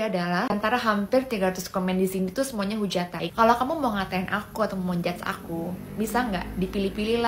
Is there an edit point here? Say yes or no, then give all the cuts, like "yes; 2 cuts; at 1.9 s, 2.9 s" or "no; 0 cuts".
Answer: yes; 1 cut; at 3.2 s